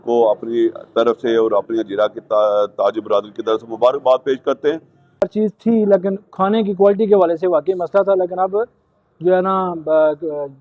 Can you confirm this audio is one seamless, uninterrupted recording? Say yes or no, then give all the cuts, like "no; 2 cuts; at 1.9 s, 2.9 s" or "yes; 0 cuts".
no; 1 cut; at 5.2 s